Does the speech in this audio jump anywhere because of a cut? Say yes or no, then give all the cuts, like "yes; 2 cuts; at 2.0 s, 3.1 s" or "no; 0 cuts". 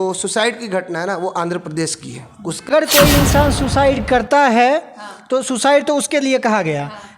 yes; 1 cut; at 2.7 s